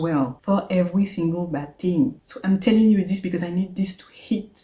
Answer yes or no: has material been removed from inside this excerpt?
yes